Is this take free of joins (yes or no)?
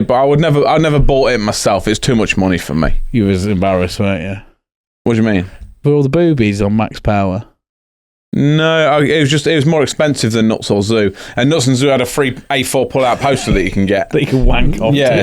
yes